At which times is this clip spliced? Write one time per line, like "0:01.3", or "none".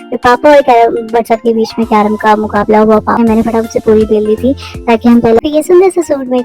0:03.2
0:05.4